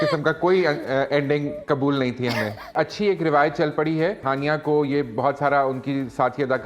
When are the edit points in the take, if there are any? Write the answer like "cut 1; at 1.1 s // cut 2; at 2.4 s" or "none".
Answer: cut 1; at 2.7 s // cut 2; at 4.2 s